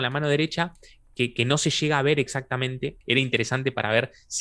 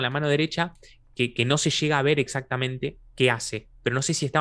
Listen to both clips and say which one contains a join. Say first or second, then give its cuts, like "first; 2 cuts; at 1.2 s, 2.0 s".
first; 1 cut; at 3.0 s